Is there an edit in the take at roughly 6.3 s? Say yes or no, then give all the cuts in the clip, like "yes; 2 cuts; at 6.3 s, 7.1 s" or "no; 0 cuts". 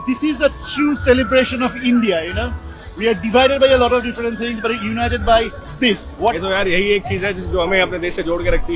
yes; 1 cut; at 6.3 s